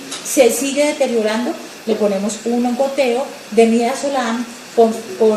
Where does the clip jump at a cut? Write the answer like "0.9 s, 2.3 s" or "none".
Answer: none